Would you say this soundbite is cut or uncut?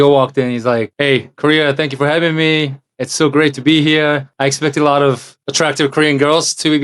cut